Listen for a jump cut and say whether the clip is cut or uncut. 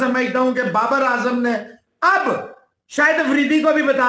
uncut